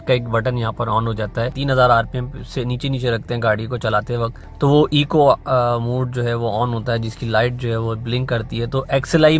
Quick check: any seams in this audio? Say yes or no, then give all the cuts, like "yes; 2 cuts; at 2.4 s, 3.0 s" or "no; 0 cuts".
yes; 2 cuts; at 1.6 s, 4.4 s